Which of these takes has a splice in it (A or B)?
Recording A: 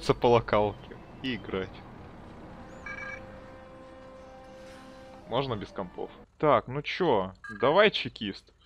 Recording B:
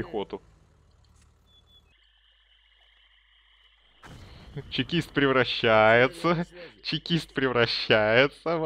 A